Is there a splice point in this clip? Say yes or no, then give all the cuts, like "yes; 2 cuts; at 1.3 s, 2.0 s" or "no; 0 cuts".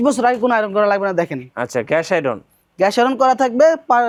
no; 0 cuts